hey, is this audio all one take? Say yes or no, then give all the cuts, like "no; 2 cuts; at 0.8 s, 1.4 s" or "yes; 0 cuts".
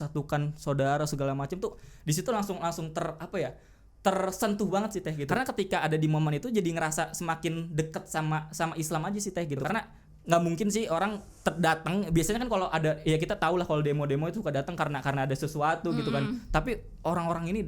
no; 2 cuts; at 5.2 s, 9.6 s